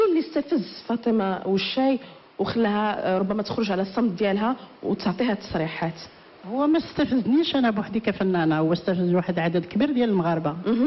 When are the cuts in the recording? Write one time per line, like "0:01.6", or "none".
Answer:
0:05.4